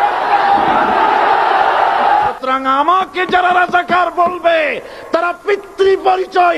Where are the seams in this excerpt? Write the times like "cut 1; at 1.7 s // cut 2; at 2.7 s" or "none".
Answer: cut 1; at 2.2 s